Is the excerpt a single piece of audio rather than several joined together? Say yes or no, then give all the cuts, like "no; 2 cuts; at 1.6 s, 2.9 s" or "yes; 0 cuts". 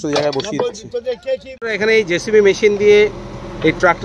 no; 1 cut; at 1.5 s